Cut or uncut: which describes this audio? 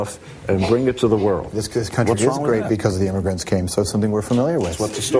uncut